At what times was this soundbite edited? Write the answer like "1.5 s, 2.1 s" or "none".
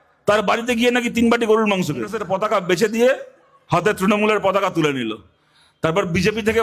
2.2 s